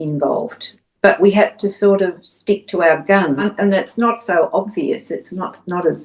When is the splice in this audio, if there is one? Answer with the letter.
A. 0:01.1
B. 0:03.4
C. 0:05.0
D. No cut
B